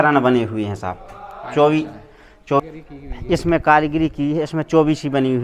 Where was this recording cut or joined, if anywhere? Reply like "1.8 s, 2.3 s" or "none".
2.6 s